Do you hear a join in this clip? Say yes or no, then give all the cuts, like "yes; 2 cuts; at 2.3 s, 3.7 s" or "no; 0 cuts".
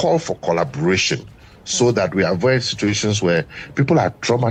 no; 0 cuts